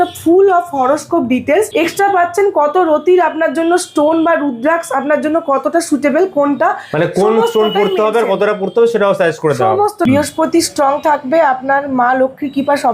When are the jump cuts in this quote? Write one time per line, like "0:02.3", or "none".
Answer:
0:01.7
0:10.1